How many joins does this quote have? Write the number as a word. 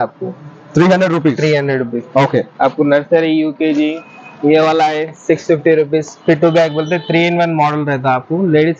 zero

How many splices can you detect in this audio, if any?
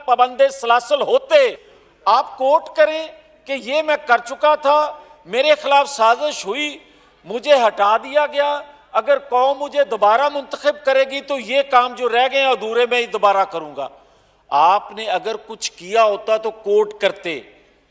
one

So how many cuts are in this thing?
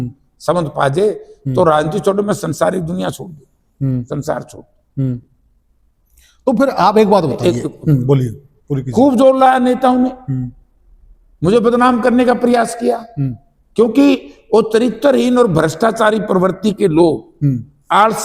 zero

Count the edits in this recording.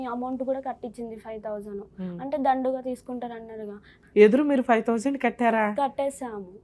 one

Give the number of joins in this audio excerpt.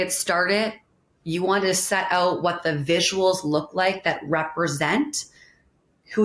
zero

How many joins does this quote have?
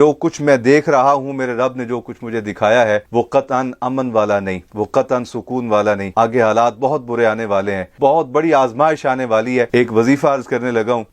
two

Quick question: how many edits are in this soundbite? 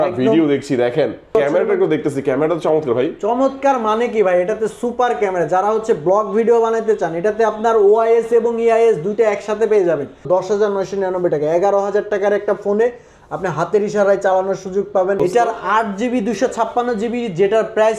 three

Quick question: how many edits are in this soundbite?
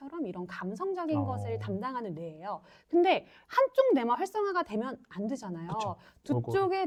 zero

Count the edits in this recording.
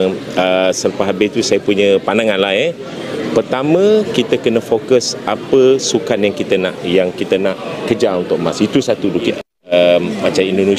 one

